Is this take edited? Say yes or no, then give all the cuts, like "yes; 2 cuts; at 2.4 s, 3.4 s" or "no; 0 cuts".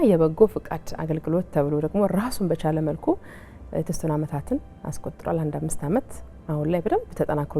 no; 0 cuts